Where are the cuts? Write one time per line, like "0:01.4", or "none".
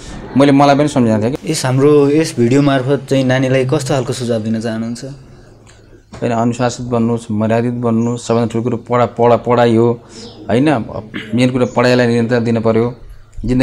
0:01.3